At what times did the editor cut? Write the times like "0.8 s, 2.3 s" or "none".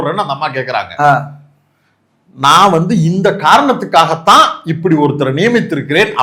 none